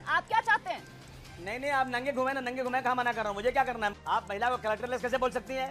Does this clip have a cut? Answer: yes; 1 cut; at 3.9 s

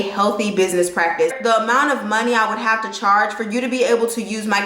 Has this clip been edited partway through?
yes; 1 cut; at 1.3 s

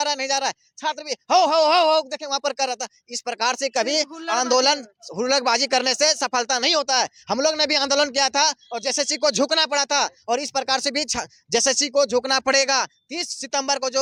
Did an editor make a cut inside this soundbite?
no; 0 cuts

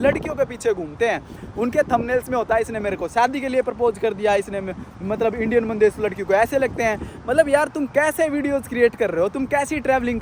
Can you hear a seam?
no; 0 cuts

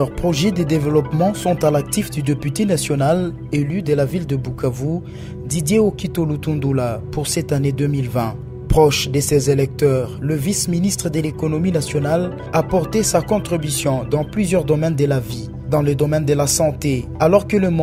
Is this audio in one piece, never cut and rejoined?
yes; 0 cuts

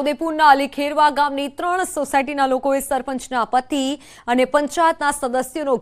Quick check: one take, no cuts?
yes; 0 cuts

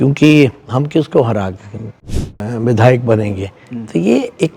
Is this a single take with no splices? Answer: no; 1 cut; at 2.2 s

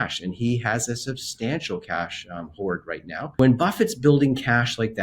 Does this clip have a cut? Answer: yes; 1 cut; at 3.4 s

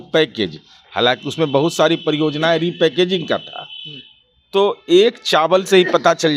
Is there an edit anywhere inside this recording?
no; 0 cuts

